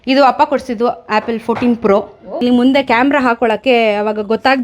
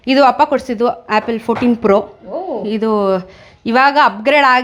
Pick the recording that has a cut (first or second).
first